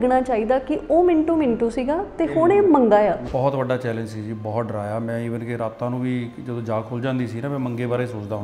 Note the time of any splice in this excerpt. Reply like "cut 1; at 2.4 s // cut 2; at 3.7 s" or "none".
cut 1; at 3.2 s